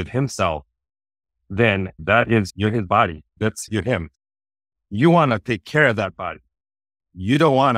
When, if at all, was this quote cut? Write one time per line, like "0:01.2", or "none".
none